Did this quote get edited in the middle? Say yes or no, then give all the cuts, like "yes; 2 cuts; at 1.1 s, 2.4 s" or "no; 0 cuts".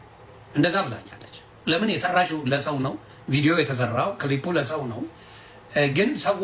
no; 0 cuts